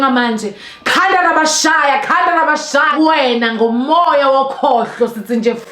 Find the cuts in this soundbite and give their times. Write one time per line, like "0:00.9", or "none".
0:02.9